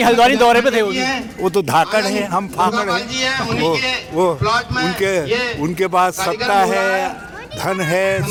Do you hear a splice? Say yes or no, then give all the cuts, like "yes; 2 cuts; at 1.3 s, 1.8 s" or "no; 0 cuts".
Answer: no; 0 cuts